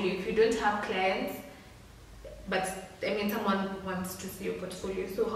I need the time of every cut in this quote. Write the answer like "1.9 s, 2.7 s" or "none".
none

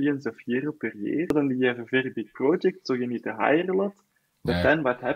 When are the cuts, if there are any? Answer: 1.3 s

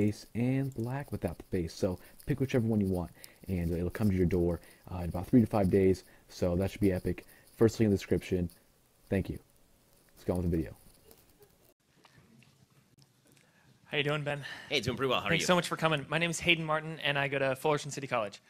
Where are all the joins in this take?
none

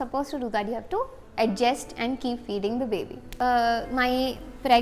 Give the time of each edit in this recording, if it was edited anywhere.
3.3 s

